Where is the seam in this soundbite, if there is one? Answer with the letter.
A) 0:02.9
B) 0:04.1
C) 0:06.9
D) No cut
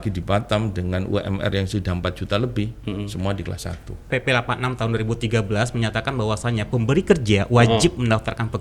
B